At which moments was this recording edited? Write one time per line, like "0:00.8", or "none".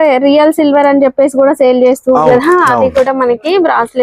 0:02.3